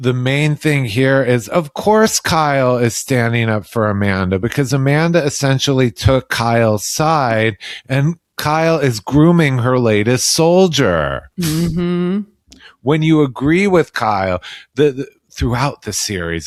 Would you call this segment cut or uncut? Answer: uncut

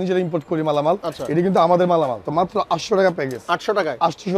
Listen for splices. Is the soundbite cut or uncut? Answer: cut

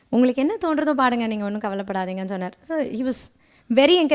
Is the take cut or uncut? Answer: uncut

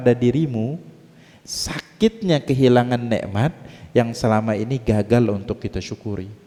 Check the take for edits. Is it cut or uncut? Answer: uncut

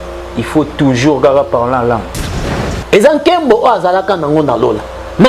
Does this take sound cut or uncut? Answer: cut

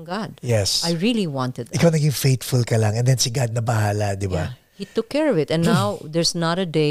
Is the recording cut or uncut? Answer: uncut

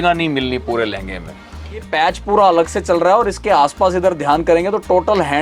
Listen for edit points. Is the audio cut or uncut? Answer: cut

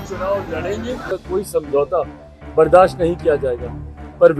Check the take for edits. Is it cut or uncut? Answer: cut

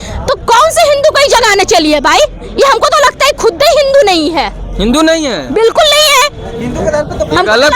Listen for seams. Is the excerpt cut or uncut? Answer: uncut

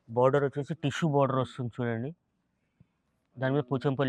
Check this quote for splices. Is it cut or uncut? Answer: uncut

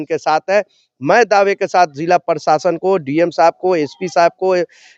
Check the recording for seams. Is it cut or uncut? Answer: uncut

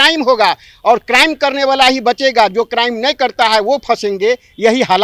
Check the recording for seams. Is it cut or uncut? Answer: uncut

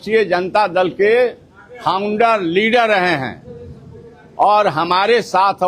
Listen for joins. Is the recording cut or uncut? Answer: uncut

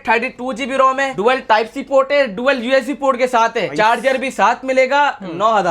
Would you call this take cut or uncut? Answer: cut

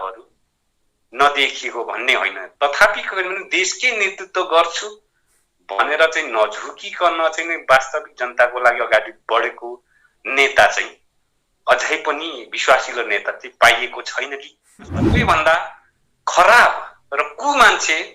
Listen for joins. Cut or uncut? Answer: cut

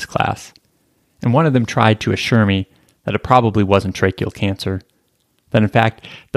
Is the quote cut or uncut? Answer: uncut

